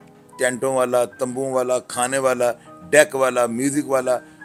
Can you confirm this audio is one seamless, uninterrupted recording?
yes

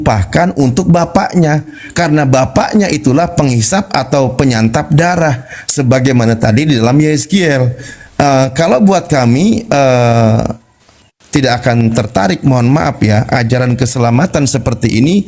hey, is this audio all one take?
yes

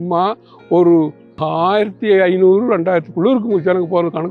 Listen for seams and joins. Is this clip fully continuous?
no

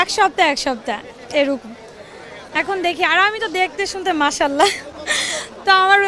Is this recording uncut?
yes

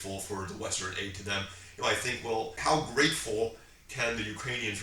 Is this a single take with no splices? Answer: no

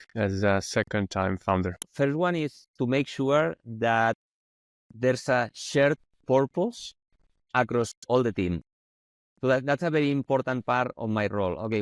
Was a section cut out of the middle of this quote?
yes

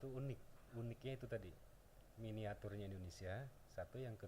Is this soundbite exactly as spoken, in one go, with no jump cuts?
yes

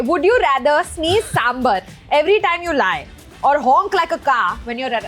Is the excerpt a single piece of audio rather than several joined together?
yes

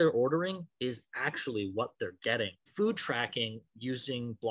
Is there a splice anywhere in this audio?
yes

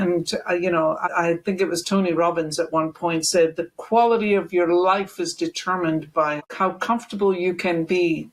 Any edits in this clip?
yes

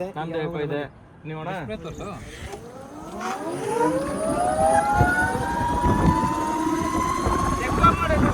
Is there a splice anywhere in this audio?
no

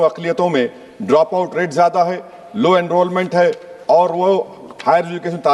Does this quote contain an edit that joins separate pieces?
no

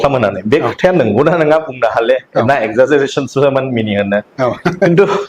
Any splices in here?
yes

